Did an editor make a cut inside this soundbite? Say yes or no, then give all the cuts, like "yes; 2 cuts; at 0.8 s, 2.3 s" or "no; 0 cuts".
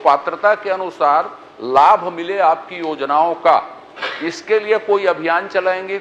no; 0 cuts